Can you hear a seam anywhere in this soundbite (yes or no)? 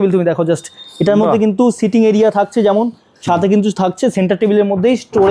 no